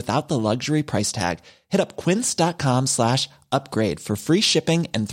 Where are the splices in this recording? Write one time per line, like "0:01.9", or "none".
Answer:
none